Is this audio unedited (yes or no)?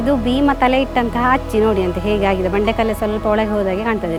yes